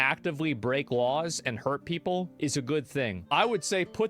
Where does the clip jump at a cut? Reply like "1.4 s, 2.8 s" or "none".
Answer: 3.2 s

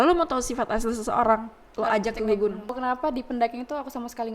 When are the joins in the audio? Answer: 2.8 s

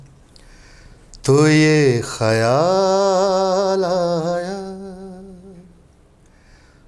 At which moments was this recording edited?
none

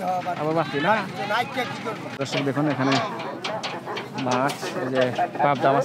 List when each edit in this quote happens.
2.2 s

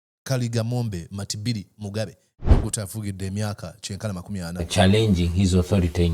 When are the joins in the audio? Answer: 2.3 s

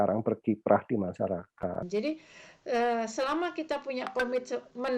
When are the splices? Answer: 1.8 s

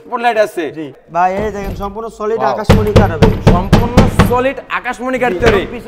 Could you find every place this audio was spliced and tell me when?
0.9 s

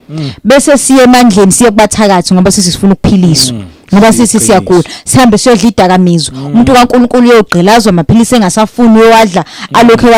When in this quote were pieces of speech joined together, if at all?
none

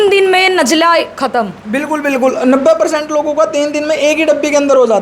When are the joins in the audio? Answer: none

